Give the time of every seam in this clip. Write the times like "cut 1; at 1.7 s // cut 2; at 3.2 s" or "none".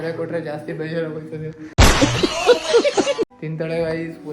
cut 1; at 3.4 s